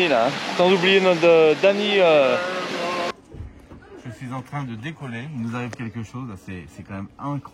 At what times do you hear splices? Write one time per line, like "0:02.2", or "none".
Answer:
0:03.1